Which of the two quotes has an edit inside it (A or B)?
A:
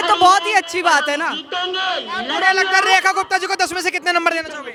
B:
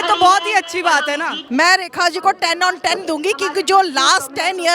B